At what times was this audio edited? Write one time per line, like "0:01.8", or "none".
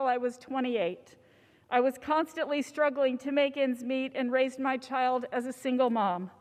none